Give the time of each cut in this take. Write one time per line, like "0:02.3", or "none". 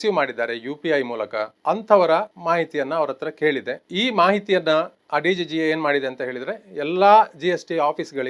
0:01.5
0:02.3
0:03.8
0:05.0